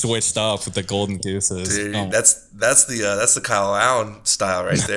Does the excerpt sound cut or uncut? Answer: uncut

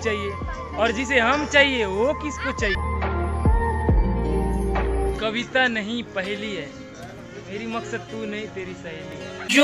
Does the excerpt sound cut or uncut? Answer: cut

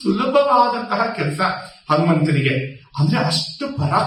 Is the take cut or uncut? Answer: uncut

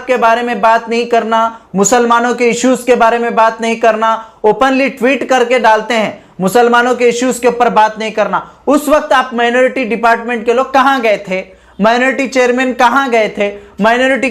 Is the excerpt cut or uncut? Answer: uncut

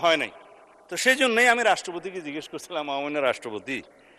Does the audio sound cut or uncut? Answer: uncut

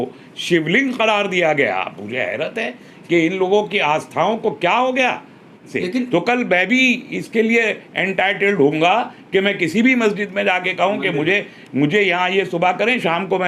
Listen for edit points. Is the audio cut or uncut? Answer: cut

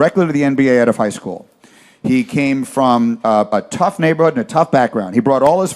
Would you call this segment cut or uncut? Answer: uncut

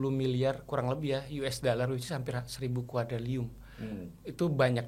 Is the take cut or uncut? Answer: uncut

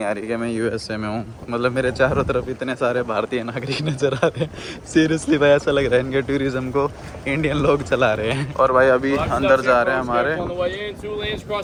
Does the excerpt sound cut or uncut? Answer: uncut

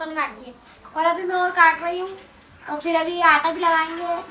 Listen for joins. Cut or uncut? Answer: uncut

